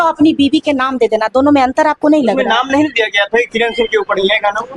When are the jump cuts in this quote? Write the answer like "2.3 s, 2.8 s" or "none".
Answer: none